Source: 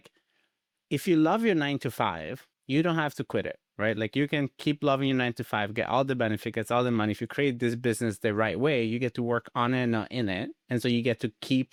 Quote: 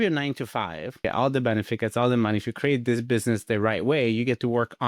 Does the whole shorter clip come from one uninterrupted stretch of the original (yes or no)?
no